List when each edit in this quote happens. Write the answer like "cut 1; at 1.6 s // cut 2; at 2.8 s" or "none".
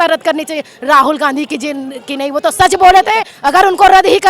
cut 1; at 3.3 s